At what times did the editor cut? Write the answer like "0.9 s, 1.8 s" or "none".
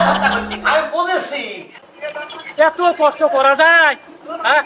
1.9 s